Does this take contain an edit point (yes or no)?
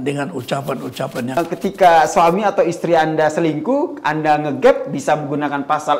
yes